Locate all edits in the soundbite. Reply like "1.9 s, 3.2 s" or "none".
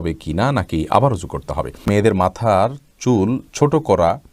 1.8 s